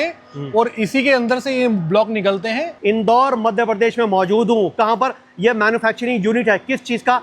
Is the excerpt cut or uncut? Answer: cut